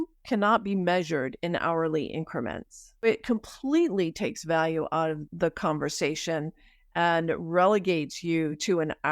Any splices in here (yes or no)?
yes